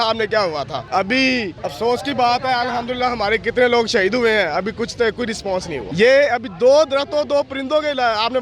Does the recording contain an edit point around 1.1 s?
yes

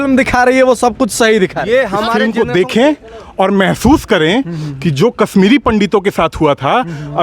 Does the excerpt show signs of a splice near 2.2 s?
yes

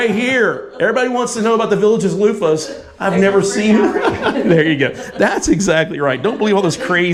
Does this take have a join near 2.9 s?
no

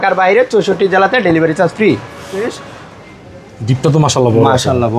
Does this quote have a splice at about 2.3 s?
yes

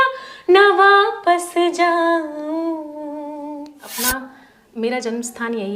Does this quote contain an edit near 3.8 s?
yes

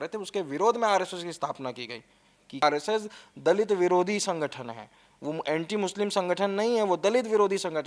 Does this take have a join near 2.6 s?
yes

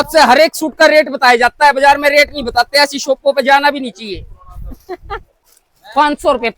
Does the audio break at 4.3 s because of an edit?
no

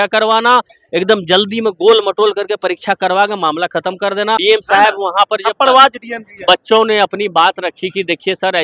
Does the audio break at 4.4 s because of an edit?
yes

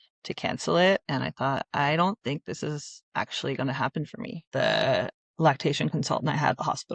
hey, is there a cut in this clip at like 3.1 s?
no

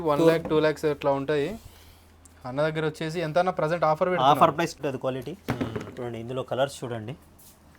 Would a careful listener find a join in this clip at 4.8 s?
yes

